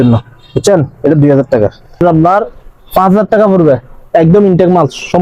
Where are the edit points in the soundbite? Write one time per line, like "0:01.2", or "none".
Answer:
0:02.0

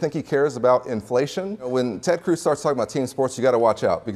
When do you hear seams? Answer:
0:01.7

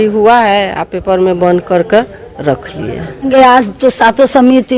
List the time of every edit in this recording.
0:03.3

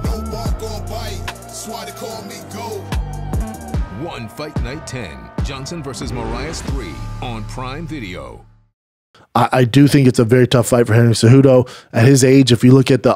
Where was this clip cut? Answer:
0:09.1

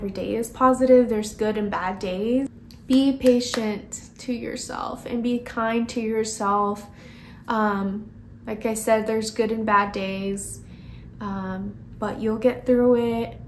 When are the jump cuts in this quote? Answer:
0:02.7

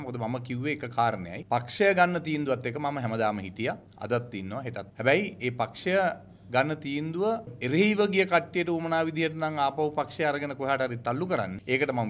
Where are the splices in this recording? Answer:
none

